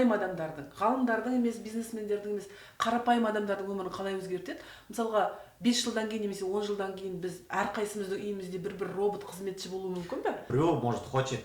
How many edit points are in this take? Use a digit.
1